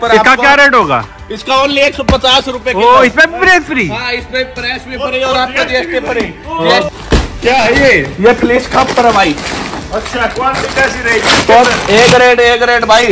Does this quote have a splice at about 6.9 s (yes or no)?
yes